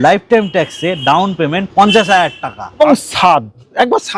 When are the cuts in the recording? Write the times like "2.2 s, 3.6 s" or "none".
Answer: 2.8 s